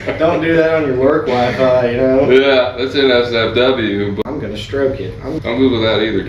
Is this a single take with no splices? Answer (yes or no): no